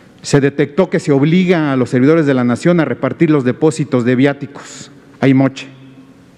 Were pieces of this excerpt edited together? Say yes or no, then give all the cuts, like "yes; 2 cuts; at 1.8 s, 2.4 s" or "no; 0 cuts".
no; 0 cuts